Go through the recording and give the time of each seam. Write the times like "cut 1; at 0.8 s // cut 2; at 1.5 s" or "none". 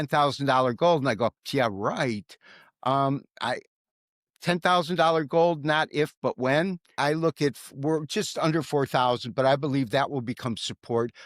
cut 1; at 6.9 s